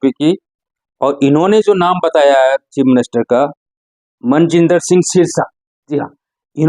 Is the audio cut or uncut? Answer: uncut